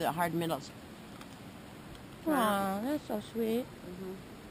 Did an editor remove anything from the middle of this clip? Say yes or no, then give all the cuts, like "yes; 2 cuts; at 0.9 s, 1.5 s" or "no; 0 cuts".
no; 0 cuts